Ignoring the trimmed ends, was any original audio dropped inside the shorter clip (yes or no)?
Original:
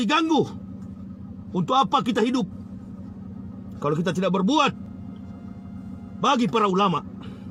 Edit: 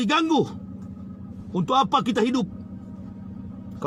no